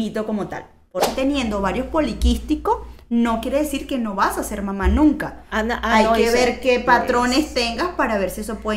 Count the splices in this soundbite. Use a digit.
1